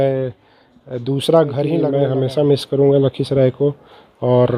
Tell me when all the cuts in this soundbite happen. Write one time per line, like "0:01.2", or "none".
0:01.9